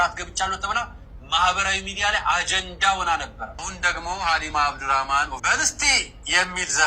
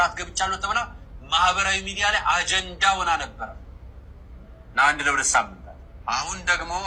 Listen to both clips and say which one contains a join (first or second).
first